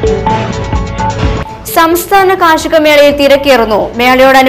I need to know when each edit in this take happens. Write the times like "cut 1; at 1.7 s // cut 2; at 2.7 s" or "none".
cut 1; at 1.3 s